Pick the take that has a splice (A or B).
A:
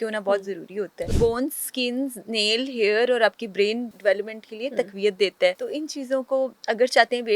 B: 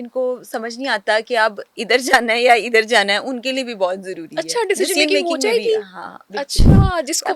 A